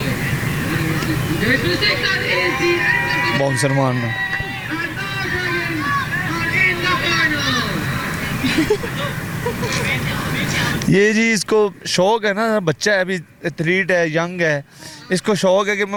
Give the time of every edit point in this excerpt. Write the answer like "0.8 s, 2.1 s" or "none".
none